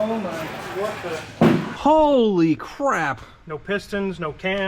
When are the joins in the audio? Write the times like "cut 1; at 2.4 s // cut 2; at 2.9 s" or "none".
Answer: cut 1; at 1.7 s